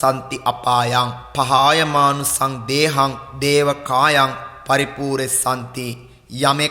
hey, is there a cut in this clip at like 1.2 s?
yes; 2 cuts; at 1.2 s, 3.3 s

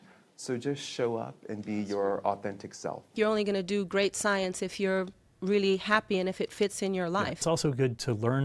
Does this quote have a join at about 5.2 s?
no; 2 cuts; at 3.1 s, 7.4 s

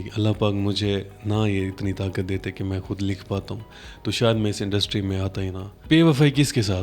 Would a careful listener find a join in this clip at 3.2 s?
no; 1 cut; at 5.8 s

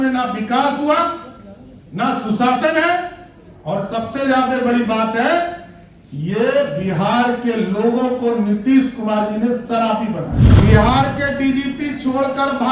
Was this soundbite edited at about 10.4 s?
yes; 1 cut; at 10.4 s

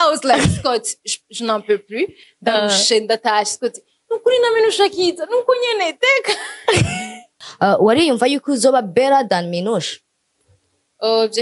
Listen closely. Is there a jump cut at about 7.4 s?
yes; 1 cut; at 7.4 s

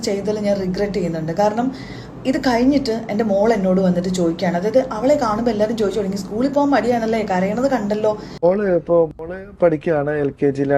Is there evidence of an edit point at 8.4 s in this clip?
yes; 1 cut; at 8.4 s

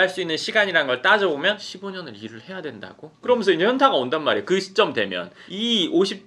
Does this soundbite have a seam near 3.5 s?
no; 1 cut; at 1.6 s

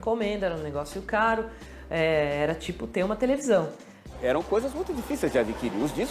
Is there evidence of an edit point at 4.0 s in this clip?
yes; 1 cut; at 4.0 s

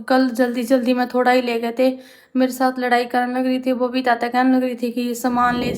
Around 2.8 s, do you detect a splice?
no; 0 cuts

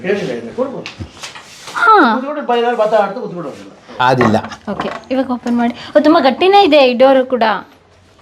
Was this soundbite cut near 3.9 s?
yes; 1 cut; at 3.9 s

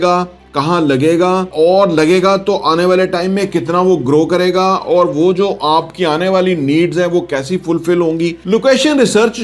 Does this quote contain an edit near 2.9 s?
no; 2 cuts; at 1.5 s, 8.4 s

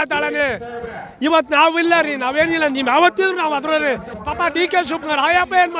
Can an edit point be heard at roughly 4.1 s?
yes; 1 cut; at 4.1 s

